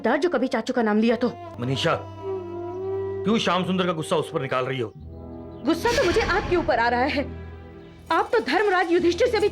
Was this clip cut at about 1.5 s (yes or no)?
yes